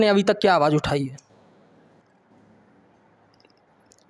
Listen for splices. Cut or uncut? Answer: uncut